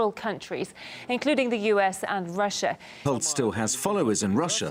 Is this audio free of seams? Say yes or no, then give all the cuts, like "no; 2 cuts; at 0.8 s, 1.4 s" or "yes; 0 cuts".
yes; 0 cuts